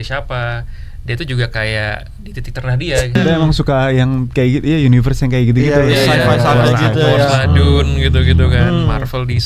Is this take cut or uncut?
cut